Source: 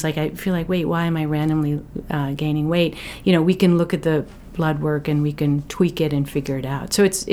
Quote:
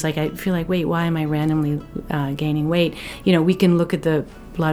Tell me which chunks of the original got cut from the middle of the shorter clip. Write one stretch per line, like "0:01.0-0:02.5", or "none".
none